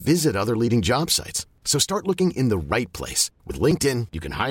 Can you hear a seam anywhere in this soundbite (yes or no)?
no